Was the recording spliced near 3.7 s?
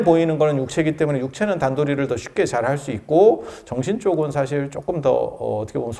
no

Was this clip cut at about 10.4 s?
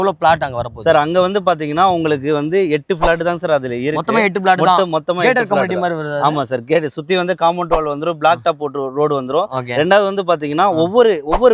no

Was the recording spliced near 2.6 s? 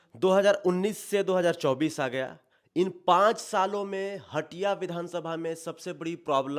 no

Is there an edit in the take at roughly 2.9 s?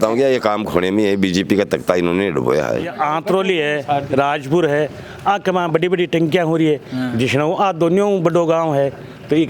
yes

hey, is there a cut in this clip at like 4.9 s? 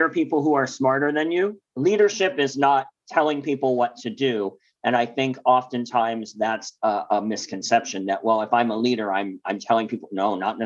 no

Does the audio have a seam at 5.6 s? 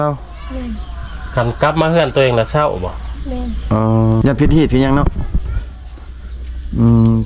no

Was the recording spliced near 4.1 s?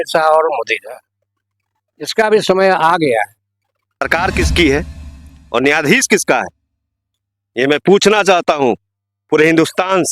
yes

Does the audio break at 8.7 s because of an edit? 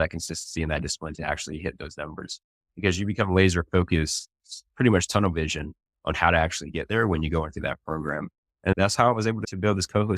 yes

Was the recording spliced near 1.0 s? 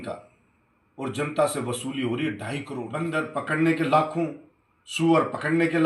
no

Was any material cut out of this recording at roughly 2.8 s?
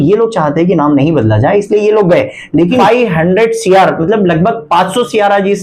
yes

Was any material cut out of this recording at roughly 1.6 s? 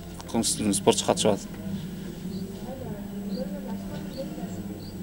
no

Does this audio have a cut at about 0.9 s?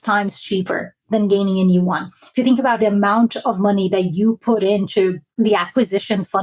no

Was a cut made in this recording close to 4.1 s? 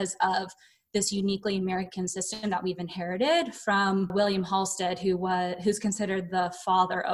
yes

